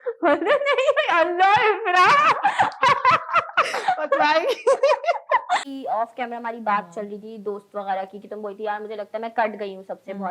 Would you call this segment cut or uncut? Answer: cut